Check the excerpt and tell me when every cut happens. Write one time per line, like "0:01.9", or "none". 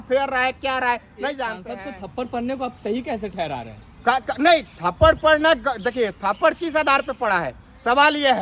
0:01.7